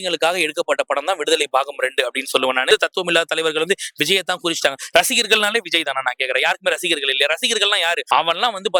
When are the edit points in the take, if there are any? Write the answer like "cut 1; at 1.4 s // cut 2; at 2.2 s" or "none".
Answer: cut 1; at 2.7 s // cut 2; at 8.0 s